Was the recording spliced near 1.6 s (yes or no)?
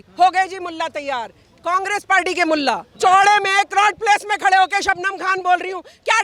no